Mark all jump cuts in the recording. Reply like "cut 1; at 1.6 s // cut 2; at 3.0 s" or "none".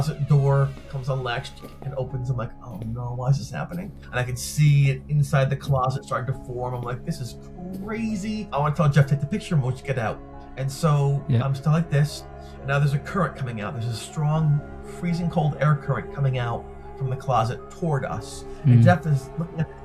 none